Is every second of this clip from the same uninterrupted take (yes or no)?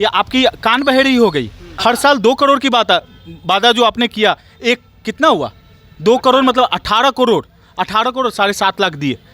no